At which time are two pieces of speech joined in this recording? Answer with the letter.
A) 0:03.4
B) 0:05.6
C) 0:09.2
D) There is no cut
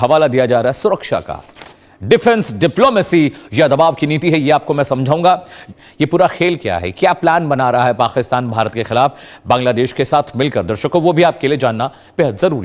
B